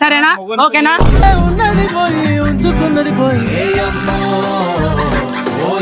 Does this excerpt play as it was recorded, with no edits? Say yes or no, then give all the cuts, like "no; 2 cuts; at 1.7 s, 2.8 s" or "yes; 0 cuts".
no; 1 cut; at 3.5 s